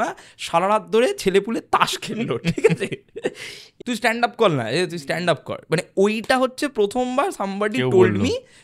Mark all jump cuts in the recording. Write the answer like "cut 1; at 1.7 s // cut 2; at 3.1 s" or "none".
cut 1; at 3.7 s